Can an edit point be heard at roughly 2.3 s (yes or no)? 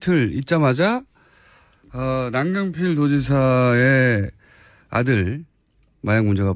yes